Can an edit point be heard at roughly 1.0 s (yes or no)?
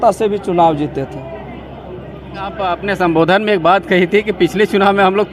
no